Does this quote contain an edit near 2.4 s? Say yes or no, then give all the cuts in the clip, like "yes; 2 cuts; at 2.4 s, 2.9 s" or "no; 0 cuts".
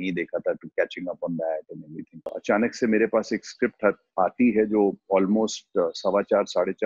yes; 1 cut; at 2.4 s